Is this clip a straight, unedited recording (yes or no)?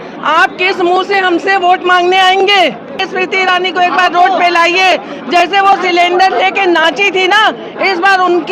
no